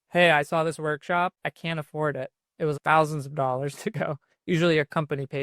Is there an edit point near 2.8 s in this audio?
yes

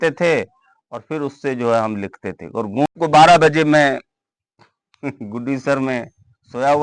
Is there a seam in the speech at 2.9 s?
yes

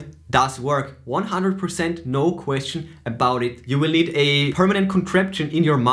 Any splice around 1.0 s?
no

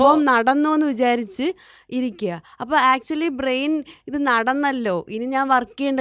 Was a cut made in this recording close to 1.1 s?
no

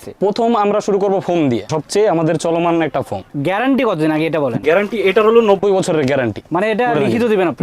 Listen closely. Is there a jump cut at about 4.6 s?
no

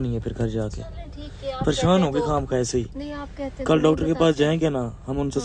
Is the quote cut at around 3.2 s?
no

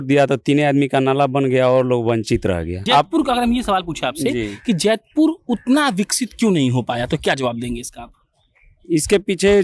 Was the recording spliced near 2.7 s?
yes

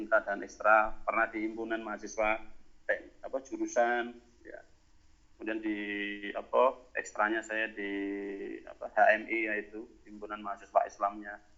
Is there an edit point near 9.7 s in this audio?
no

